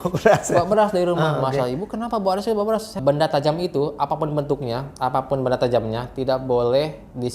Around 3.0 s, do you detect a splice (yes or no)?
yes